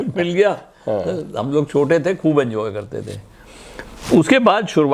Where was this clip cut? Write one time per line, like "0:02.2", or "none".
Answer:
none